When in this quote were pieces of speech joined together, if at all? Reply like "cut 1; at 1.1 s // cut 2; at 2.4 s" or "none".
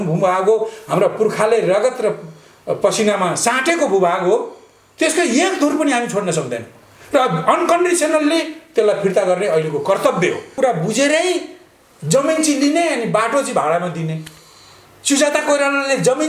cut 1; at 10.5 s